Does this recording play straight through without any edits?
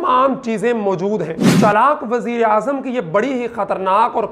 no; 1 cut; at 1.4 s

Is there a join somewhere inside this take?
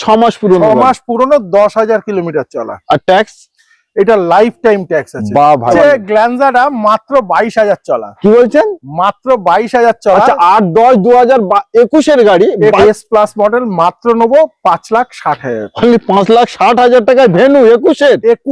yes; 2 cuts; at 5.7 s, 12.8 s

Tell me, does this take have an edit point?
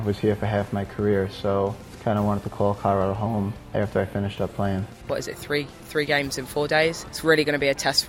yes; 4 cuts; at 1.9 s, 3.7 s, 5.0 s, 7.1 s

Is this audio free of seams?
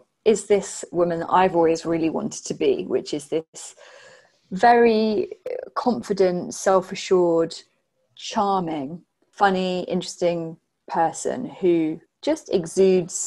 no; 1 cut; at 12.1 s

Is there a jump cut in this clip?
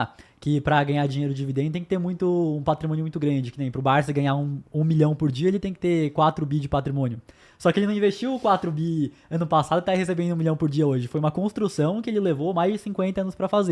no; 0 cuts

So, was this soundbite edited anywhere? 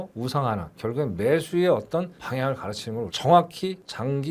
no; 0 cuts

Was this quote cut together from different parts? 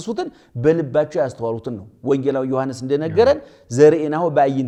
no; 0 cuts

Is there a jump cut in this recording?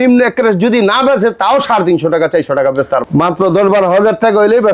yes; 1 cut; at 3.0 s

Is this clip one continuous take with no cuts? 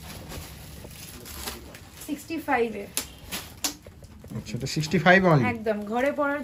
yes; 0 cuts

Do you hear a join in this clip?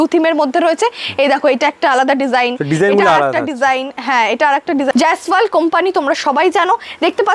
yes; 1 cut; at 4.9 s

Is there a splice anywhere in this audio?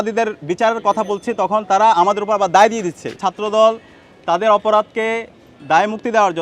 yes; 1 cut; at 3.2 s

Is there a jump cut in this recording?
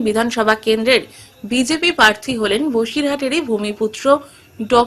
no; 0 cuts

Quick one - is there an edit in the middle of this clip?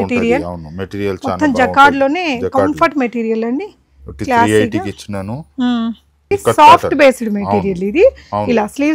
yes; 1 cut; at 6.2 s

